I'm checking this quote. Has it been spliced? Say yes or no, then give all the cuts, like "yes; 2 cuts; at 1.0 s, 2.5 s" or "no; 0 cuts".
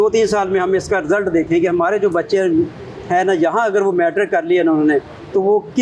no; 0 cuts